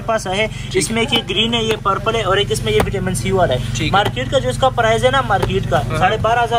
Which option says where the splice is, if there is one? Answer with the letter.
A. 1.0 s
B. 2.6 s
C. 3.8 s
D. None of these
D